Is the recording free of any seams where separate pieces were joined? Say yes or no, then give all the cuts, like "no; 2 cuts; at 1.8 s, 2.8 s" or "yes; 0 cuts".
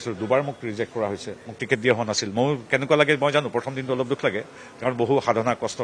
yes; 0 cuts